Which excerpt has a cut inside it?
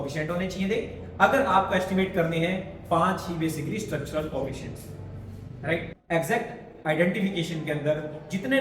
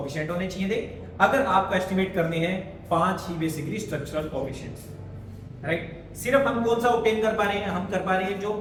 first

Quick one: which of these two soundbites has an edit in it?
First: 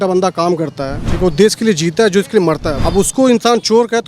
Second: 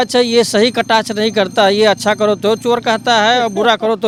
first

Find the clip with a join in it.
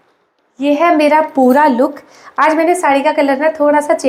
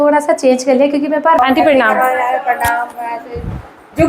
second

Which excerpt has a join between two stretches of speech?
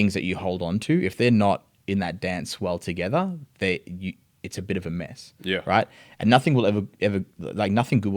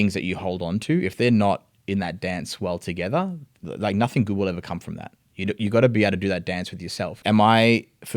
second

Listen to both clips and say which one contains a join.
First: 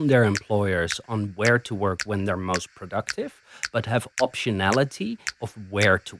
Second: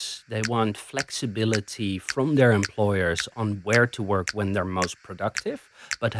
first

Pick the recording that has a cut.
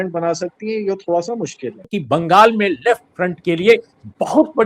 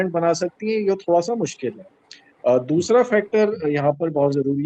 first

